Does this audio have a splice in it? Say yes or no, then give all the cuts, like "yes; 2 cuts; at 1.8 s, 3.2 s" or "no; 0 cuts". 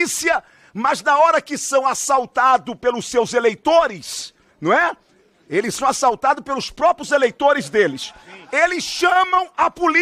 no; 0 cuts